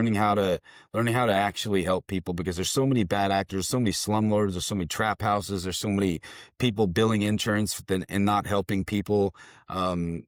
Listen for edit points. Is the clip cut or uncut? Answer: uncut